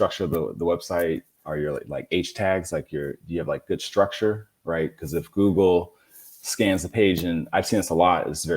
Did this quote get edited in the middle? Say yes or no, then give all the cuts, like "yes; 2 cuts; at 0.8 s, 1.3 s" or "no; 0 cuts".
yes; 1 cut; at 1.3 s